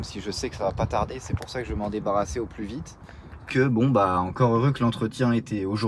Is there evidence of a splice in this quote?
yes; 1 cut; at 3.5 s

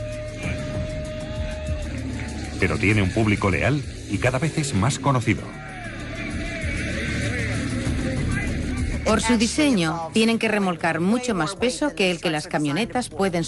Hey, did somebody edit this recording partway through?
no; 0 cuts

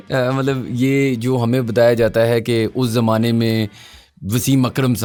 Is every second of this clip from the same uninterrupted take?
yes; 0 cuts

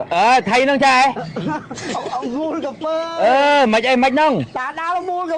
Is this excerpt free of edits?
yes; 0 cuts

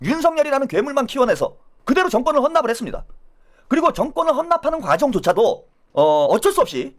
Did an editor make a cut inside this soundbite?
no; 0 cuts

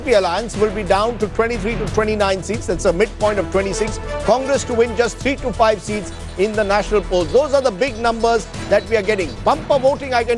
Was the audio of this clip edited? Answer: yes; 1 cut; at 4.2 s

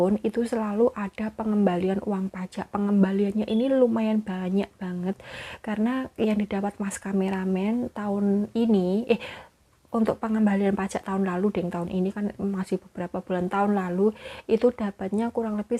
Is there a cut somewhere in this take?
no; 0 cuts

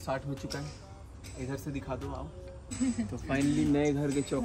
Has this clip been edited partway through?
yes; 1 cut; at 2.8 s

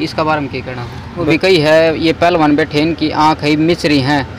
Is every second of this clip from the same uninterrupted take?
no; 1 cut; at 1.3 s

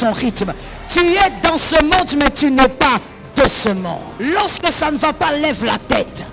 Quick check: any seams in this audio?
yes; 1 cut; at 4.1 s

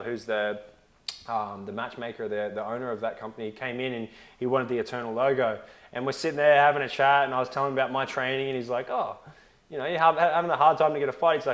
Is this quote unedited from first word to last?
yes; 0 cuts

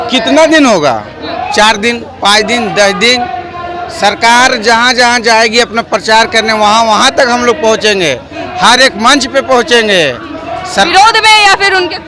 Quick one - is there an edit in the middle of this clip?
no; 0 cuts

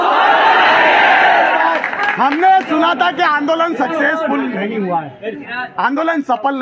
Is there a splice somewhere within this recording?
no; 0 cuts

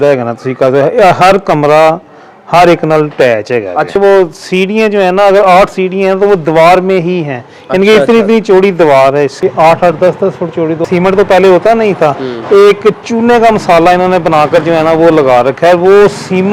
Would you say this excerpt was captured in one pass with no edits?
no; 3 cuts; at 4.0 s, 9.3 s, 10.8 s

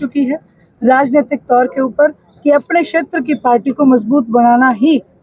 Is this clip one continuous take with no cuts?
yes; 0 cuts

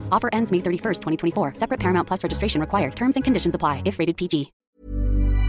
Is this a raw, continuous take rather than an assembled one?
no; 1 cut; at 4.6 s

